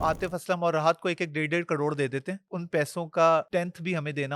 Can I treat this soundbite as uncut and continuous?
no; 2 cuts; at 2.5 s, 3.5 s

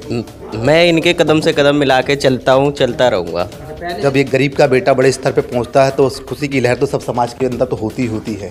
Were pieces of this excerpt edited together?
yes; 1 cut; at 4.0 s

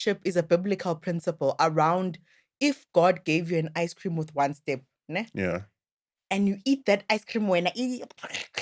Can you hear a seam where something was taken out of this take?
no; 0 cuts

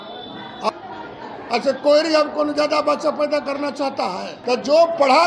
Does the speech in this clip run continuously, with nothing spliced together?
no; 2 cuts; at 0.7 s, 4.3 s

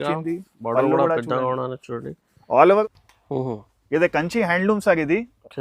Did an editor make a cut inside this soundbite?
yes; 1 cut; at 2.8 s

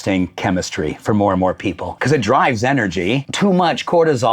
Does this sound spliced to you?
yes; 2 cuts; at 1.9 s, 3.3 s

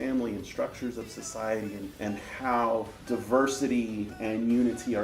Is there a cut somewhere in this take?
yes; 2 cuts; at 1.9 s, 3.0 s

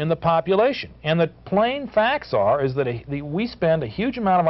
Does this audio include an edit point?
no; 0 cuts

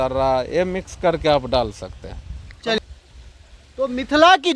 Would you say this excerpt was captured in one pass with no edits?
no; 1 cut; at 2.8 s

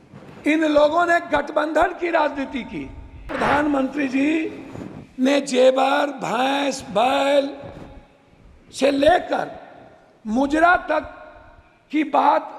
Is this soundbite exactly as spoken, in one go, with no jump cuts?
no; 1 cut; at 3.3 s

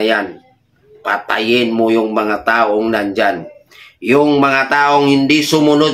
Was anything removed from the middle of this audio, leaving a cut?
no; 0 cuts

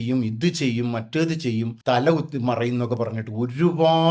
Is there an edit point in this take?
yes; 1 cut; at 1.7 s

